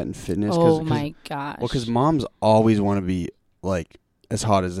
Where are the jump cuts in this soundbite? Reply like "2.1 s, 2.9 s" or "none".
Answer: none